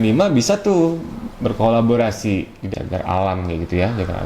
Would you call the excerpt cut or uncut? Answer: cut